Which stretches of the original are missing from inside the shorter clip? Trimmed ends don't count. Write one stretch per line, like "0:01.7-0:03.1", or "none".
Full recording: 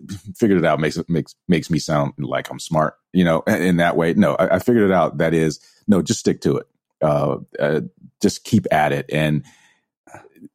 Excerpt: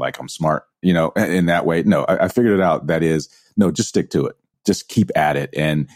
0:06.8-0:08.0